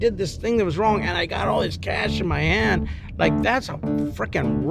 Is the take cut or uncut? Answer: uncut